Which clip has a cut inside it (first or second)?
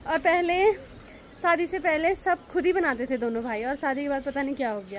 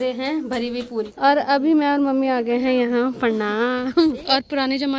second